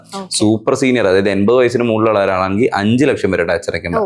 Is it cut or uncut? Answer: uncut